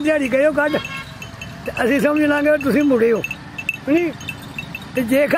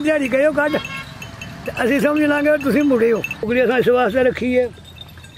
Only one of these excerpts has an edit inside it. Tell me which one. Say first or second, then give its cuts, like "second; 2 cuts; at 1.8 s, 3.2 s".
second; 1 cut; at 3.5 s